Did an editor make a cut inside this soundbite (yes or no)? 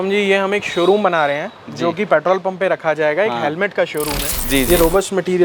yes